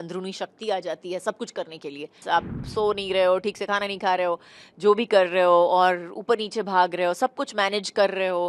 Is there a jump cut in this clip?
yes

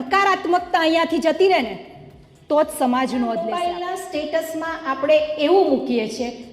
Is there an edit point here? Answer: yes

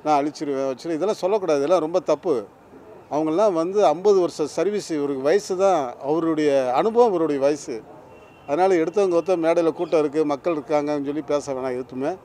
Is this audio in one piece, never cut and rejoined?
yes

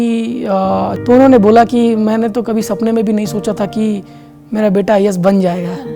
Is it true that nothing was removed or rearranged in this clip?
no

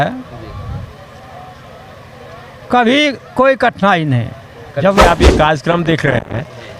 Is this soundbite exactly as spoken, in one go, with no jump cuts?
no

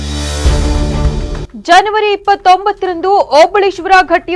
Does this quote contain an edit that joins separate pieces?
no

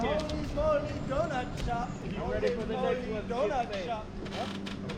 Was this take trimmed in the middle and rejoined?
yes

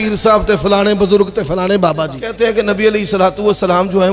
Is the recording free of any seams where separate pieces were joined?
no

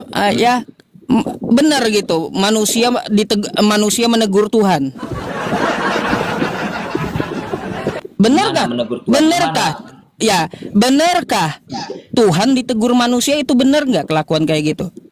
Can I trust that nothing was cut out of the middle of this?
yes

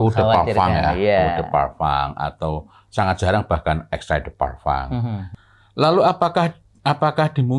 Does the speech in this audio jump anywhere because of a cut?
yes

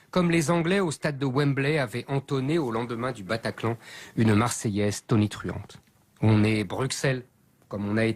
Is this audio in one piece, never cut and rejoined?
no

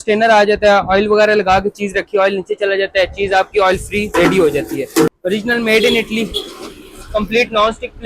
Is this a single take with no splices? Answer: no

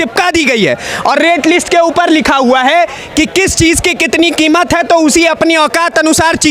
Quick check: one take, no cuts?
yes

